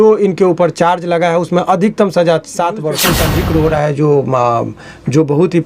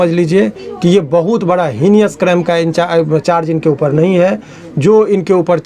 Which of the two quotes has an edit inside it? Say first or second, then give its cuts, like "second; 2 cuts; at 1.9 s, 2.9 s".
first; 1 cut; at 3.1 s